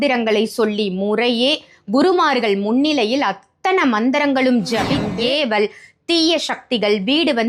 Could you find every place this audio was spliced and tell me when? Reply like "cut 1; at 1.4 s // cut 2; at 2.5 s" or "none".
cut 1; at 5.1 s